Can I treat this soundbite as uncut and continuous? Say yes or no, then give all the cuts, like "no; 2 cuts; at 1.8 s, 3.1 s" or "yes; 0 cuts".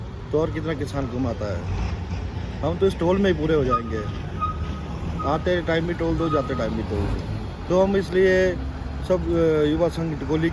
yes; 0 cuts